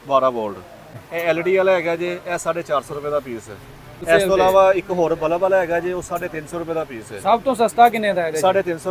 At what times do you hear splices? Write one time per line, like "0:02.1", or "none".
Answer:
0:01.0
0:04.0